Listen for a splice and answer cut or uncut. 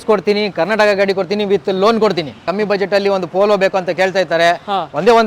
cut